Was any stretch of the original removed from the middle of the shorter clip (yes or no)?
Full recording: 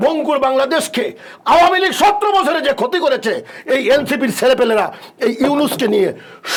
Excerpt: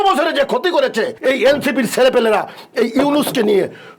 yes